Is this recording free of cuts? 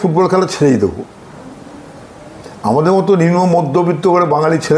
yes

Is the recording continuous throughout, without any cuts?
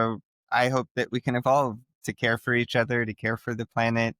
yes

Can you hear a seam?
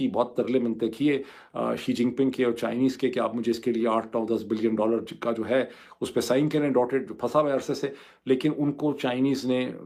no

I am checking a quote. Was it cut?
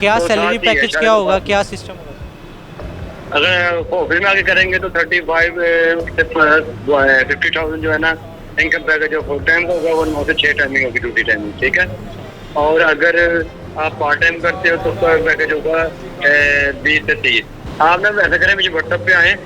no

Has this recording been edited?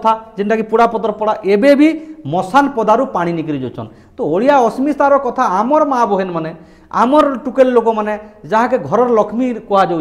no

